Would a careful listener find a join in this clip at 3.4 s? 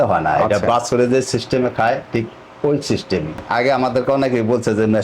yes; 1 cut; at 3.4 s

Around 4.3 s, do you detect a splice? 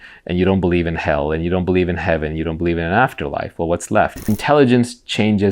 yes; 1 cut; at 4.3 s

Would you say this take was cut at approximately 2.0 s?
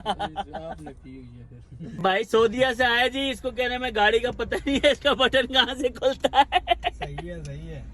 yes; 1 cut; at 2.0 s

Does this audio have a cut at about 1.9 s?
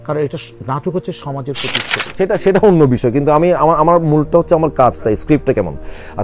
yes; 1 cut; at 1.9 s

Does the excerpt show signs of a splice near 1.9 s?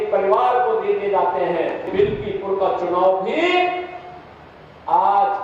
yes; 1 cut; at 1.9 s

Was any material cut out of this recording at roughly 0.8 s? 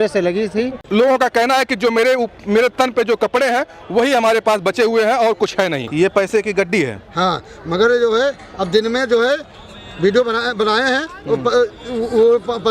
yes; 2 cuts; at 0.8 s, 5.9 s

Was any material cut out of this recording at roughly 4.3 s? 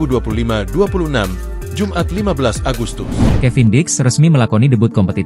no; 1 cut; at 3.0 s

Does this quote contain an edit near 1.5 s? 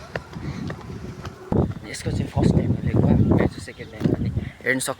yes; 1 cut; at 1.5 s

